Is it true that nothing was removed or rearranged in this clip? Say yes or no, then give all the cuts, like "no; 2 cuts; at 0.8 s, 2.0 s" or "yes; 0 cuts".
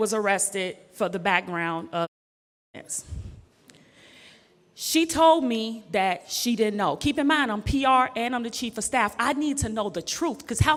yes; 0 cuts